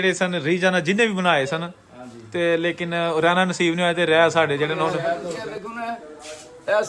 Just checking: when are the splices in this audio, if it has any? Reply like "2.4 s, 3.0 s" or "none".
5.4 s